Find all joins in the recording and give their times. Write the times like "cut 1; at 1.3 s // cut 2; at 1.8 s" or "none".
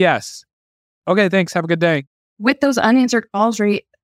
cut 1; at 2.0 s